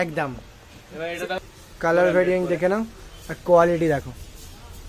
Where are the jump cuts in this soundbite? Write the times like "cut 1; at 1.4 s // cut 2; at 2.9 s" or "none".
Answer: cut 1; at 1.4 s